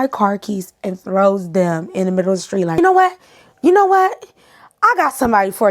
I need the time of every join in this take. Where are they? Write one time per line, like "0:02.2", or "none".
0:02.7